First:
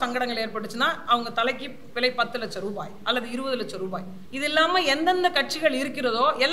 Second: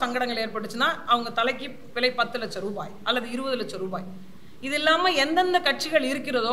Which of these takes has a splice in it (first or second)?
first